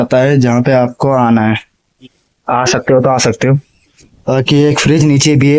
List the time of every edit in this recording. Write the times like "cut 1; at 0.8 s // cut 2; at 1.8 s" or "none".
none